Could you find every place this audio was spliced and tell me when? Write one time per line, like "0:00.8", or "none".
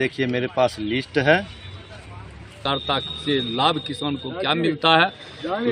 0:02.6